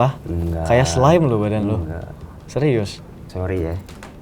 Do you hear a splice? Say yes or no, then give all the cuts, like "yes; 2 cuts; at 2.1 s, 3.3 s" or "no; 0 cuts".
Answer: yes; 1 cut; at 3.2 s